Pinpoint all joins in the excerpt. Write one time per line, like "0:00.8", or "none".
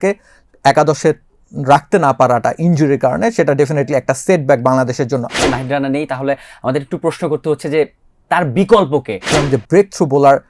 0:05.4
0:09.3